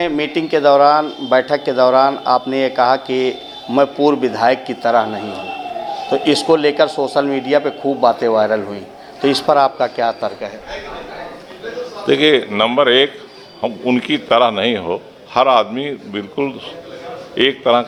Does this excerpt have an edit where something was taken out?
no; 0 cuts

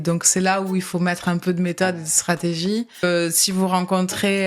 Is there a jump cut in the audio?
yes; 1 cut; at 3.0 s

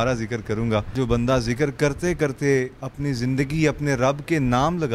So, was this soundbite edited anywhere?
yes; 1 cut; at 0.9 s

